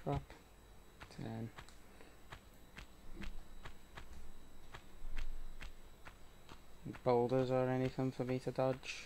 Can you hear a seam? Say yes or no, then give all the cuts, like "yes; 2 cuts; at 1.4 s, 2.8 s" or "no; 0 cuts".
yes; 1 cut; at 6.2 s